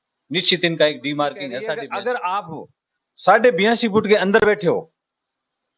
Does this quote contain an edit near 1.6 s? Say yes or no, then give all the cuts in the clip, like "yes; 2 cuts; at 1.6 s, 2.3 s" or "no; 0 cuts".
yes; 1 cut; at 1.6 s